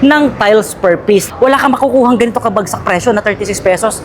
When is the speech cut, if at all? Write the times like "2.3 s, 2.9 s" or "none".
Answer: 1.3 s